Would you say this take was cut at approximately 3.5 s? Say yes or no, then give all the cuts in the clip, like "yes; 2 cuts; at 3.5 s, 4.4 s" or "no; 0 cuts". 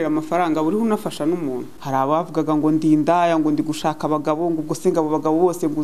no; 1 cut; at 1.7 s